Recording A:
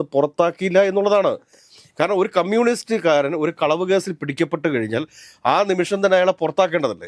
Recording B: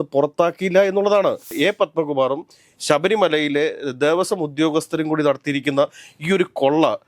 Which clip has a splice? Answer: B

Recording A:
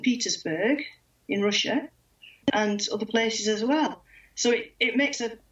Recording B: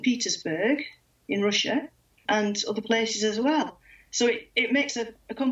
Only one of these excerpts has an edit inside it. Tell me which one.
B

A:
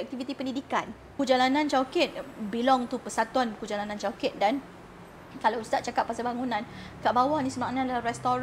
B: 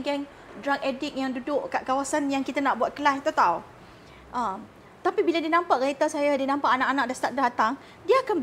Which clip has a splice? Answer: A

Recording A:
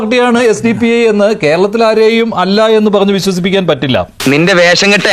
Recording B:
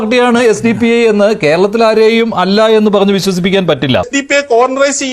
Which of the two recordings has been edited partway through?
B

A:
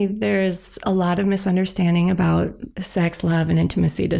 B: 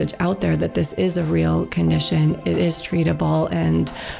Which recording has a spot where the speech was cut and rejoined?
A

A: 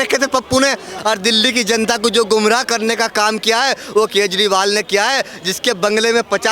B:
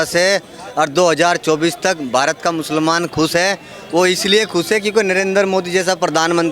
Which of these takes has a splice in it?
A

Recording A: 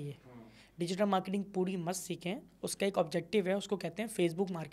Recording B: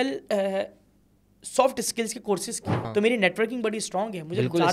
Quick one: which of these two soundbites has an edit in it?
B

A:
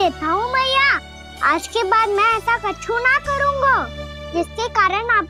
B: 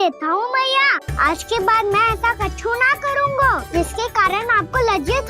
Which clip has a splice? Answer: B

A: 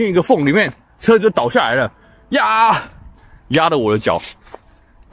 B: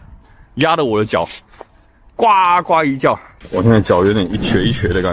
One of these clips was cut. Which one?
B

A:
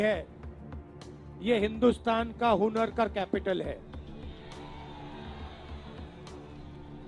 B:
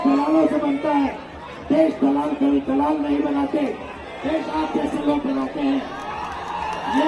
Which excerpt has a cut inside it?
A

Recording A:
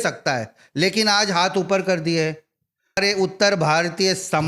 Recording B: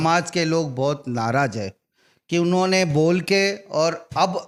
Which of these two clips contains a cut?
A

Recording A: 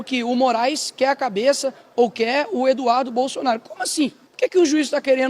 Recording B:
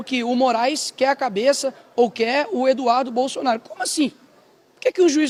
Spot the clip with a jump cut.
A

